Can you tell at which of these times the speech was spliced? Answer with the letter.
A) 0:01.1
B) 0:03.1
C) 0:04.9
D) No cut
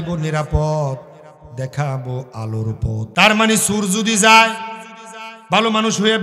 B